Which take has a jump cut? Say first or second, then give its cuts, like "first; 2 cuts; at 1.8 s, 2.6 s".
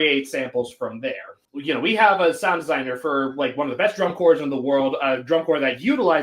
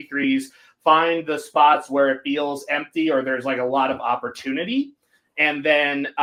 first; 1 cut; at 1.4 s